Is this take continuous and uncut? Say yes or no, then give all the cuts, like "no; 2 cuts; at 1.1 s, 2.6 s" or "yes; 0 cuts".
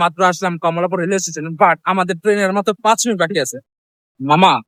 yes; 0 cuts